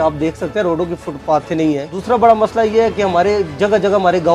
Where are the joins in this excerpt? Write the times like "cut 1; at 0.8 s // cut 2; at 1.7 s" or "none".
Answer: cut 1; at 1.9 s

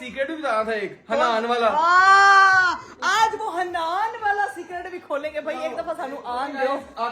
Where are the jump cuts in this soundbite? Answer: none

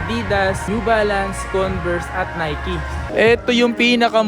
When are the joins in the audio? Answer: cut 1; at 3.0 s

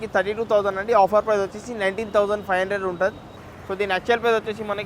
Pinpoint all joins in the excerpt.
cut 1; at 3.4 s

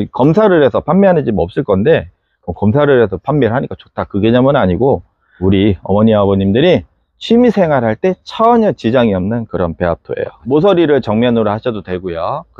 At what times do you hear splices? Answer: cut 1; at 10.4 s

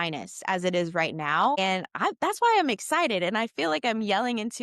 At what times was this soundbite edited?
cut 1; at 1.6 s

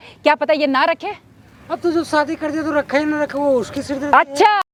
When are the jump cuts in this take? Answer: none

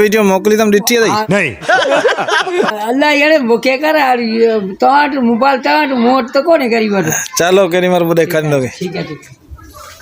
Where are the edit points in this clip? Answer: none

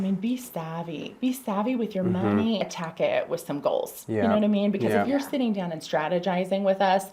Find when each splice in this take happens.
cut 1; at 2.6 s

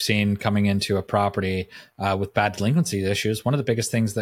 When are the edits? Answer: none

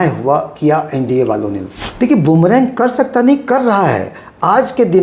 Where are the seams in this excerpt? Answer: cut 1; at 1.8 s

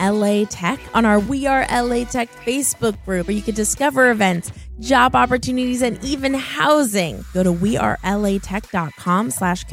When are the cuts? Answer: none

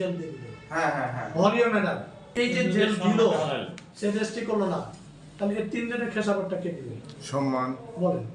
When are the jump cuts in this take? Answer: cut 1; at 2.3 s

